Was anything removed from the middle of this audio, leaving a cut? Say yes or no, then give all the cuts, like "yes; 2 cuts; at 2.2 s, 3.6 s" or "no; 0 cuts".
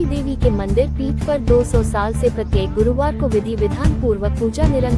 no; 0 cuts